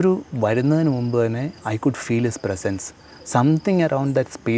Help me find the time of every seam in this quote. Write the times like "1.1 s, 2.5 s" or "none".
none